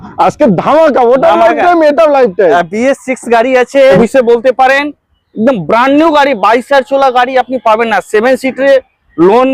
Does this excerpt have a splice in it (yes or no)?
yes